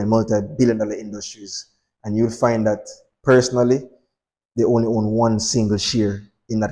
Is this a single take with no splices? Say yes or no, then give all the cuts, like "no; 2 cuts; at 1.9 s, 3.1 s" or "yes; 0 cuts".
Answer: yes; 0 cuts